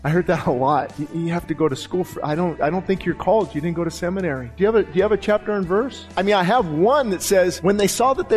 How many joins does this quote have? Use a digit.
5